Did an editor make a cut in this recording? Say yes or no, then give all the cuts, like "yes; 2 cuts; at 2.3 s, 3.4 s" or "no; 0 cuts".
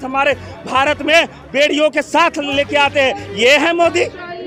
no; 0 cuts